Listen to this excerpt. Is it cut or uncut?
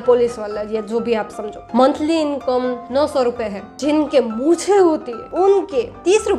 cut